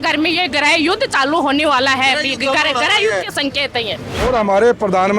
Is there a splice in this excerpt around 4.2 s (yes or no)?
yes